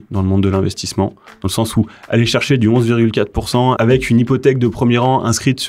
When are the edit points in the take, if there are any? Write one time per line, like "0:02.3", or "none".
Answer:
0:03.8